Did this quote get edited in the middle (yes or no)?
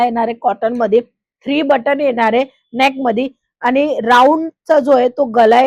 no